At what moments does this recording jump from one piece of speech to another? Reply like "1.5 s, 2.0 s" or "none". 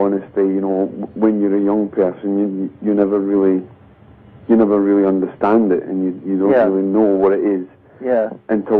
7.7 s